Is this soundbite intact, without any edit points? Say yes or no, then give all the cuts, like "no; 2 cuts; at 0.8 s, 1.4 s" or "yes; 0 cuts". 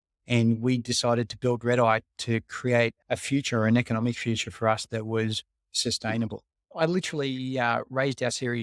no; 1 cut; at 6.7 s